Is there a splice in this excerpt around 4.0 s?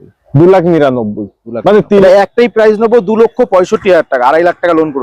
no; 1 cut; at 2.0 s

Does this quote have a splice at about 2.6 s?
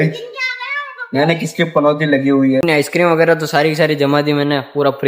yes; 1 cut; at 2.6 s

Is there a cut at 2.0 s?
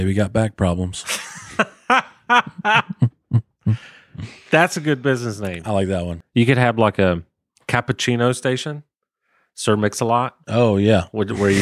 no; 1 cut; at 6.2 s

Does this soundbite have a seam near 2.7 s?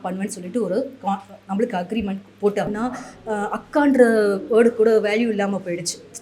yes; 1 cut; at 2.7 s

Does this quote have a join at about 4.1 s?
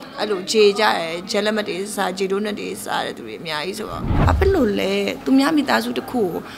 yes; 1 cut; at 4.1 s

